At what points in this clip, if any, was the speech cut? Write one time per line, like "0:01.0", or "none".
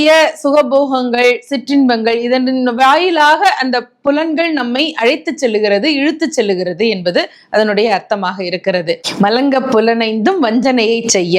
0:09.1